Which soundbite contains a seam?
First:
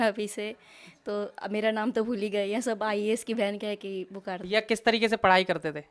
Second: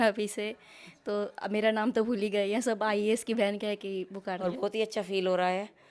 second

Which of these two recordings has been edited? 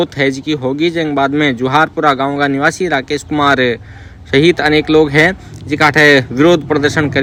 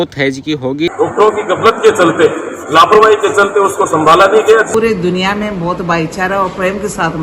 second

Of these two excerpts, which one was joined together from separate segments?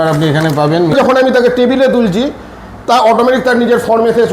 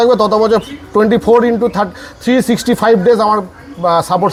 first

